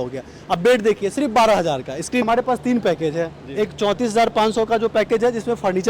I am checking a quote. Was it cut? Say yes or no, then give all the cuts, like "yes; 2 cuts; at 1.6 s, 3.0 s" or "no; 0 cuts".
yes; 1 cut; at 2.2 s